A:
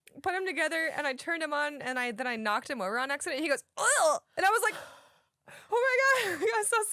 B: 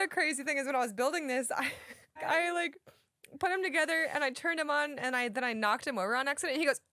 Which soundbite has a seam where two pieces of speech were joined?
B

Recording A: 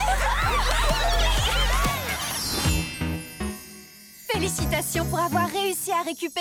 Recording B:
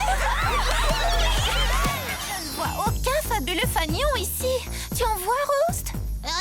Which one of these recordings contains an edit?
B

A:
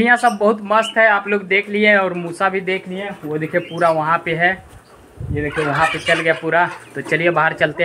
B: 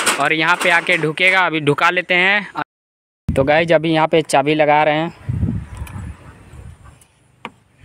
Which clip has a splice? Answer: B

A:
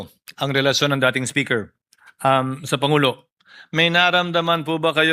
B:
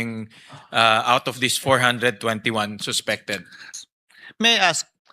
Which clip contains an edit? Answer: B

